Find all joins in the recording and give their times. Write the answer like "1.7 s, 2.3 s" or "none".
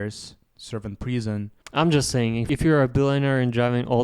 1.6 s, 2.4 s